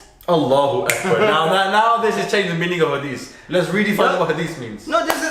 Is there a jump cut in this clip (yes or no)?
no